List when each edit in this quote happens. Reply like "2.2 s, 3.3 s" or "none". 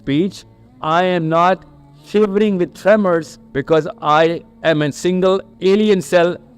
3.4 s, 4.5 s, 5.5 s